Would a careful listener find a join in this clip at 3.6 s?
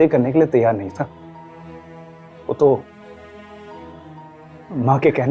no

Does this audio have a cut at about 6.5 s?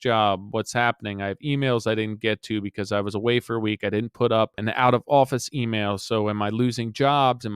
no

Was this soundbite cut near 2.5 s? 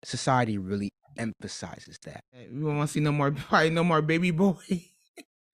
yes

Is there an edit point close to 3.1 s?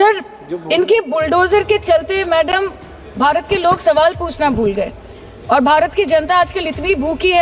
no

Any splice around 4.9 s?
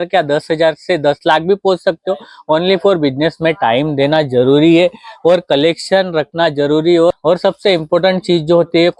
no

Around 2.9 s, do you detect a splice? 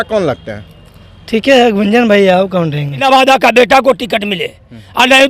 yes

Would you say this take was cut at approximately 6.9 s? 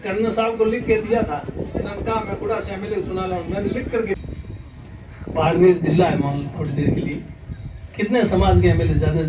no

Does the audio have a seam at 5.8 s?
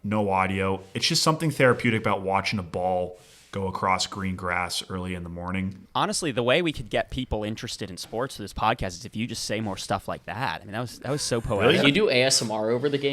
yes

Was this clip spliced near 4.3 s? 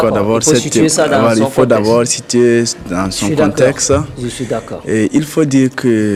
no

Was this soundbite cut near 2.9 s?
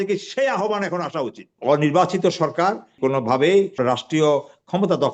yes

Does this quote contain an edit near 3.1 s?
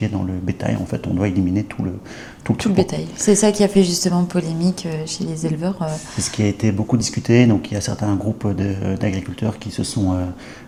no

